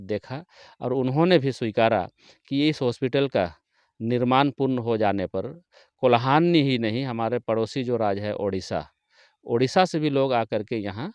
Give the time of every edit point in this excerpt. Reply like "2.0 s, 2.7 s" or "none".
none